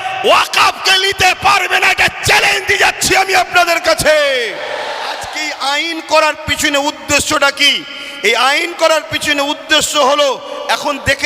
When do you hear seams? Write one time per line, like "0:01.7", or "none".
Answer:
0:05.3